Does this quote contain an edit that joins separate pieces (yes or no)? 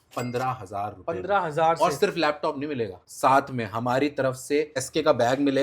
yes